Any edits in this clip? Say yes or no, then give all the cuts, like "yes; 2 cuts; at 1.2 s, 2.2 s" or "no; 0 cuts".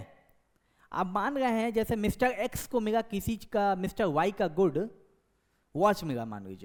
no; 0 cuts